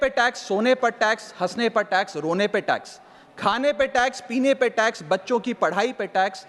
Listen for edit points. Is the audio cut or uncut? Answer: uncut